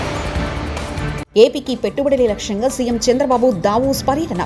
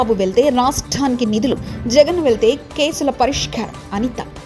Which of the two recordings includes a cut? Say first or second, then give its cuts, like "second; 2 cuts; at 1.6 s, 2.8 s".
first; 1 cut; at 1.2 s